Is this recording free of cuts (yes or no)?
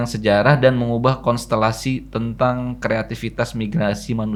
yes